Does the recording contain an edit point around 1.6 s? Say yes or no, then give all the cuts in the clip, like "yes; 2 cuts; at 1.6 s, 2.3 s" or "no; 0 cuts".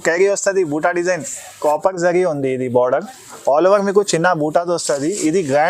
yes; 1 cut; at 1.6 s